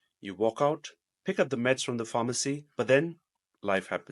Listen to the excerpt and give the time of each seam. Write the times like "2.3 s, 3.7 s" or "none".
2.6 s